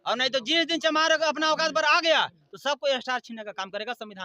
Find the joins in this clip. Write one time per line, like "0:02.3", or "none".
none